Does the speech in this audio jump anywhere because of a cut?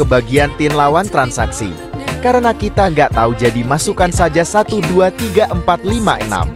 no; 0 cuts

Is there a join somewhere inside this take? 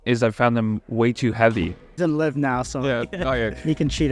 yes; 1 cut; at 1.9 s

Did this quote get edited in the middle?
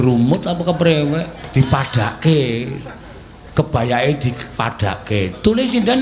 yes; 1 cut; at 1.4 s

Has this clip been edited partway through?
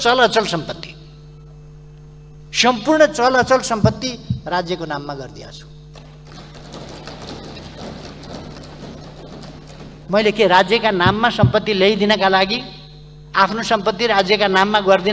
no; 0 cuts

